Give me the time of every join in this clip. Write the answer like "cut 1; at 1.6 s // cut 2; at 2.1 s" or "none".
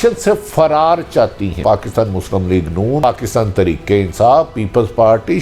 cut 1; at 1.6 s // cut 2; at 3.0 s